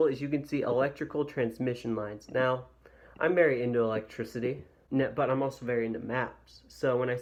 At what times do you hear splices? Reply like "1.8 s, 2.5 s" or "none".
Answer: none